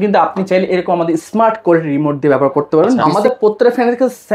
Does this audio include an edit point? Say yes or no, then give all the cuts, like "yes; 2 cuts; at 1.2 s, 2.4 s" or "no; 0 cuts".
yes; 1 cut; at 3.1 s